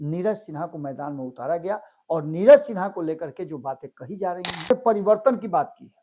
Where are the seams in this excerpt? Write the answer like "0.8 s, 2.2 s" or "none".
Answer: 4.7 s

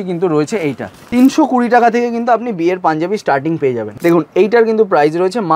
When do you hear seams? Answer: 0.9 s, 3.9 s

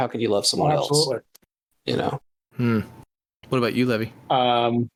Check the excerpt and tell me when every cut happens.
none

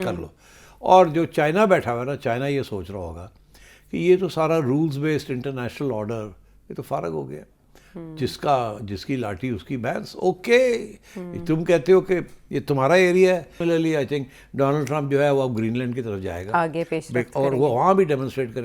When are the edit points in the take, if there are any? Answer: 13.6 s

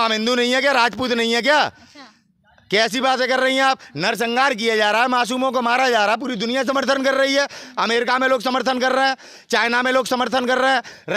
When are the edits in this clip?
none

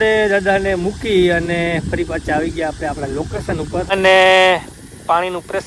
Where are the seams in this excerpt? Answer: 3.9 s

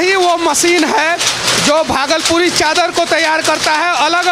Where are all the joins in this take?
none

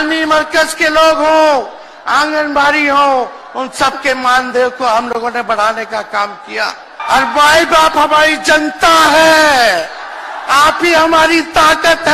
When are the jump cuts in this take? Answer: 6.9 s

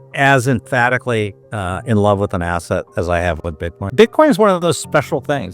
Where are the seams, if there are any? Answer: 1.5 s, 3.9 s

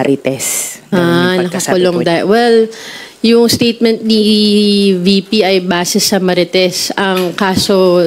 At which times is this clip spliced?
none

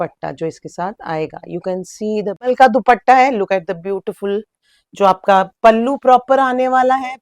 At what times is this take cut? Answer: 2.5 s

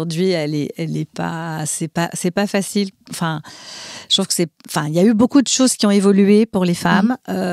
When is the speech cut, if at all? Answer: none

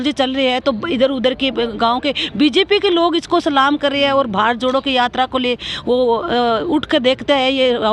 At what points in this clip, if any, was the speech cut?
none

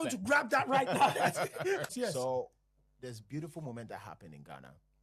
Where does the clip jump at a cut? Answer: 1.9 s

